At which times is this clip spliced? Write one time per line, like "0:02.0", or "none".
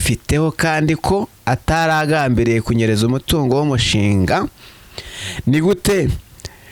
none